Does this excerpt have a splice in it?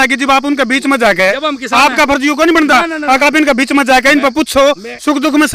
no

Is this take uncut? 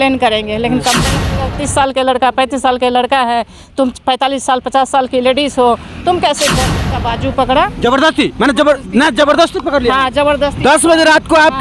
no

